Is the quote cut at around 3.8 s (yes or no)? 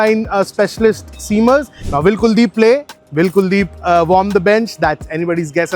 no